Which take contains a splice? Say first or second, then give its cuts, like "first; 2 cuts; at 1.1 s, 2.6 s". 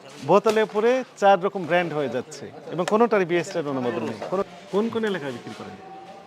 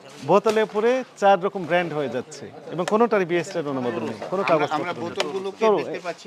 first; 1 cut; at 4.4 s